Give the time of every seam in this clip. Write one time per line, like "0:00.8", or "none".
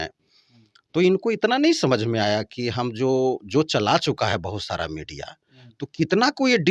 none